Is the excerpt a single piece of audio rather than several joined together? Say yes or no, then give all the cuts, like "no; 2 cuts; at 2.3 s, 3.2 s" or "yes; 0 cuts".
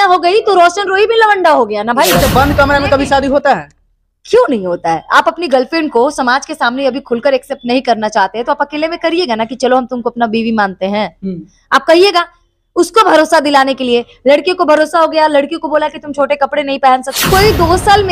no; 2 cuts; at 2.1 s, 17.1 s